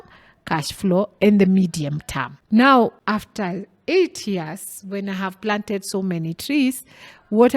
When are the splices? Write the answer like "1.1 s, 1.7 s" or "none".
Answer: 2.3 s, 3.0 s